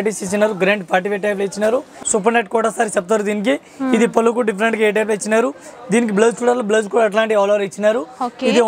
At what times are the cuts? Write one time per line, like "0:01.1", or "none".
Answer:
0:01.9